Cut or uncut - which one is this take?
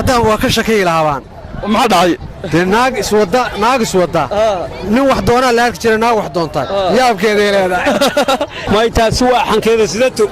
cut